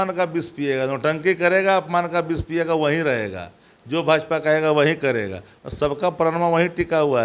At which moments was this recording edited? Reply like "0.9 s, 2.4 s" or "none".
none